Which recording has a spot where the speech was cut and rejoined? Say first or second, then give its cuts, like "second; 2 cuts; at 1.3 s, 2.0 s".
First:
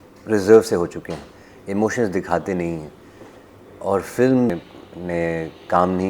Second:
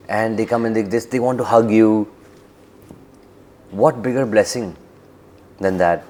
first; 1 cut; at 4.6 s